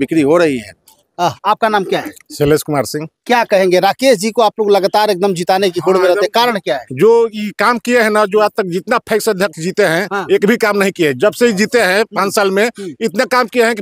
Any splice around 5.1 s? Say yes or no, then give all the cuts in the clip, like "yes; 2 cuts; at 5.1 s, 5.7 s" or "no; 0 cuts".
no; 1 cut; at 1.0 s